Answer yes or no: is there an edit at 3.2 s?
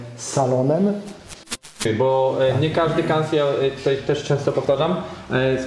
no